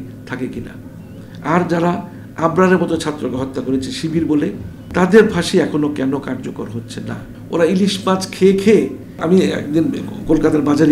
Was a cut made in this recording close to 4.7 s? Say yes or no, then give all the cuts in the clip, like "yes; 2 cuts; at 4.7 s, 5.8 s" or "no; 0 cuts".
yes; 3 cuts; at 4.7 s, 7.3 s, 9.2 s